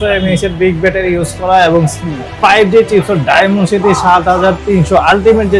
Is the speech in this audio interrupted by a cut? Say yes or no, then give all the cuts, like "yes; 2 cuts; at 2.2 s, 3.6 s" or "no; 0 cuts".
no; 0 cuts